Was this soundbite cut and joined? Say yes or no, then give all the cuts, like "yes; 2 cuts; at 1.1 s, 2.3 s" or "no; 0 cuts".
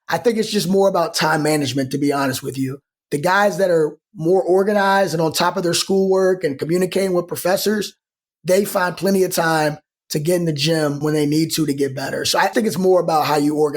yes; 2 cuts; at 11.0 s, 12.5 s